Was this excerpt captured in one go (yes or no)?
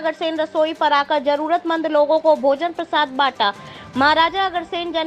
yes